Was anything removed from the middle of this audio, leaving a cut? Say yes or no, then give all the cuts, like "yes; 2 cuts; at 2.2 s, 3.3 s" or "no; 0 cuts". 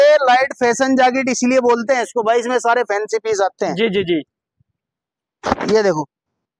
no; 0 cuts